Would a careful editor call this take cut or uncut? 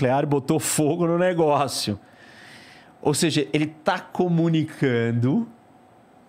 uncut